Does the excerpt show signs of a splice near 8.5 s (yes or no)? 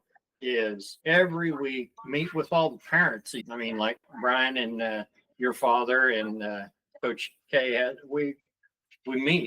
no